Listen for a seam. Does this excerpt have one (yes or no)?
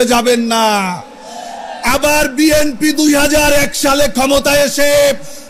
no